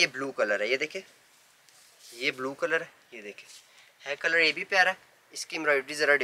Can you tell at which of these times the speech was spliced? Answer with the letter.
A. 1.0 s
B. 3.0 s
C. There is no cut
C